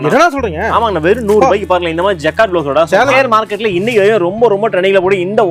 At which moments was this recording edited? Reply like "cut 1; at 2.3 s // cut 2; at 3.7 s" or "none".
cut 1; at 3.1 s